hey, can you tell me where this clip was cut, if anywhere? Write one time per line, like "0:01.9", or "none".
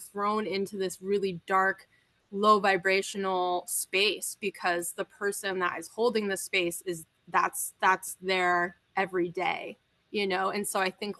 none